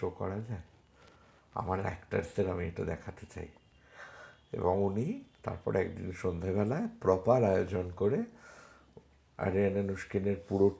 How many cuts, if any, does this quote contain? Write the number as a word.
zero